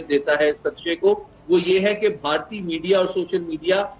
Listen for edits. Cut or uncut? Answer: uncut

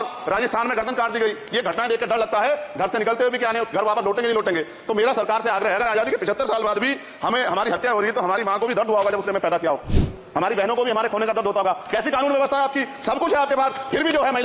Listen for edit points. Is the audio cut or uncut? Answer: uncut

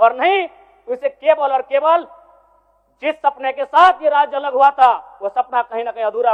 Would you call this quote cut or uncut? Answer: uncut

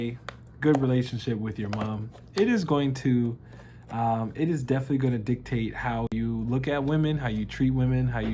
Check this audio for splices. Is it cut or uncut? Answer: uncut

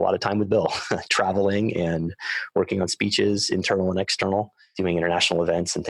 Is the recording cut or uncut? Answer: cut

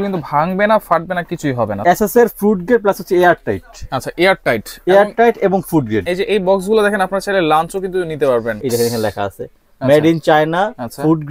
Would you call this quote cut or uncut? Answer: cut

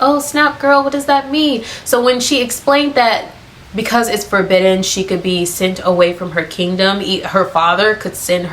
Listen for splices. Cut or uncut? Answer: uncut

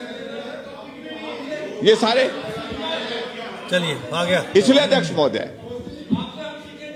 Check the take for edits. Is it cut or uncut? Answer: uncut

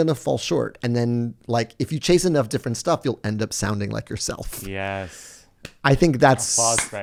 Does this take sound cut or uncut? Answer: uncut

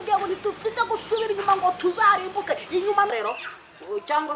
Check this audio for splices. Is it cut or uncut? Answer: cut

